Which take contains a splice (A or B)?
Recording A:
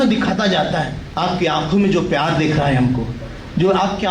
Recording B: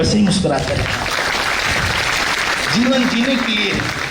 A